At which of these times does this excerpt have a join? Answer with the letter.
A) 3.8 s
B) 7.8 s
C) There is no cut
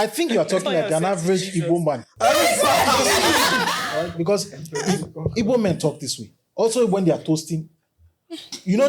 A